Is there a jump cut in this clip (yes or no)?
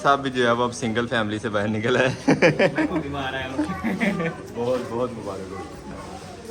no